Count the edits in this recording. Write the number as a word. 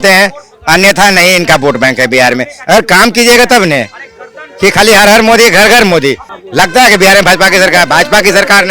zero